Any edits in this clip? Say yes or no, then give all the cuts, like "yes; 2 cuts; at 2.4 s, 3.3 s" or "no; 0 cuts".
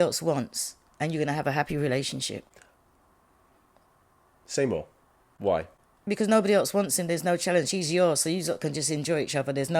no; 0 cuts